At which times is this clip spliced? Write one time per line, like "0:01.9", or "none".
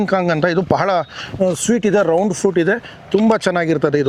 none

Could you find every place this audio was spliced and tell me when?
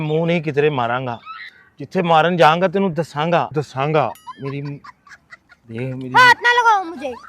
0:04.4

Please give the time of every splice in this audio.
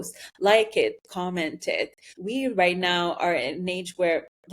0:02.1

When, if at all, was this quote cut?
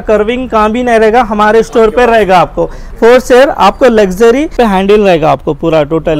0:04.5

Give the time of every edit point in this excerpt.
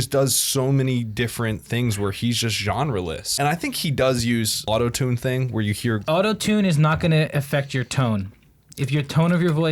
0:03.2
0:04.6
0:06.0

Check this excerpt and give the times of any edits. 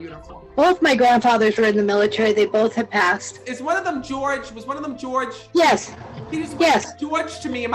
0:05.4

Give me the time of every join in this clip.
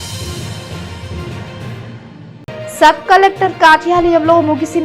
none

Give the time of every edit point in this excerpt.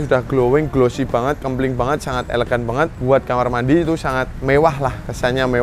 0:03.0
0:04.3

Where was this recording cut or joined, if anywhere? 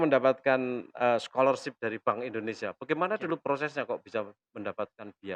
none

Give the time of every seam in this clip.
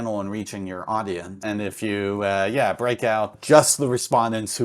0:01.4
0:03.4

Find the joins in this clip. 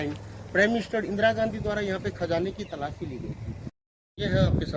0:03.8

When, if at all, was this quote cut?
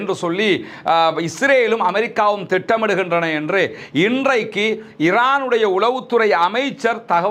none

